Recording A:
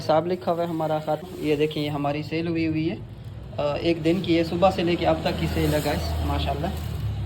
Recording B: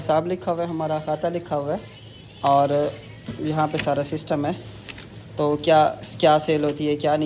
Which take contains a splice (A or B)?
A